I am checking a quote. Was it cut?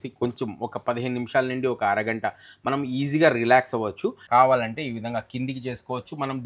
yes; 1 cut; at 4.2 s

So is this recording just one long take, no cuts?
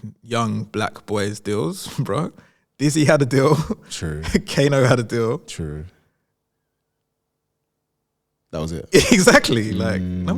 yes; 0 cuts

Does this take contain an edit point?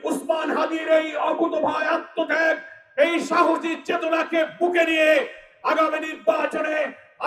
no; 0 cuts

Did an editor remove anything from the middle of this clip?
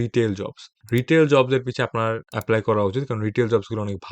no; 0 cuts

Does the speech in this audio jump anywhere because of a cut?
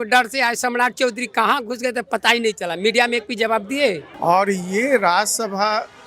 yes; 1 cut; at 4.1 s

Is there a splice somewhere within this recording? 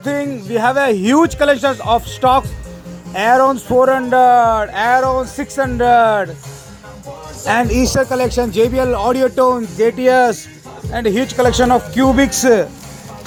no; 0 cuts

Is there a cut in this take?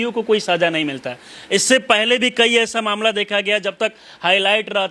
no; 0 cuts

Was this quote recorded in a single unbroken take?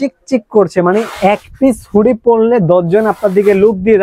yes; 0 cuts

